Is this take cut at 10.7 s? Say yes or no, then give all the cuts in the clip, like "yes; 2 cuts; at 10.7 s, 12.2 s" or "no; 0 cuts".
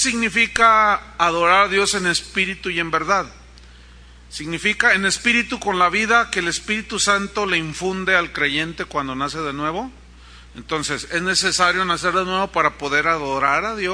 yes; 1 cut; at 10.7 s